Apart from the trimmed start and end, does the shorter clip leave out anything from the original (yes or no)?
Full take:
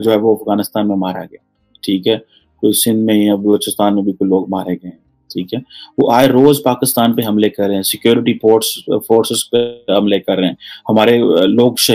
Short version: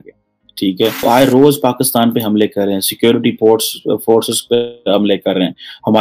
yes